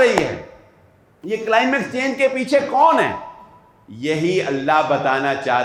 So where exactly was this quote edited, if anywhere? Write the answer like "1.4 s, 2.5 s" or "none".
none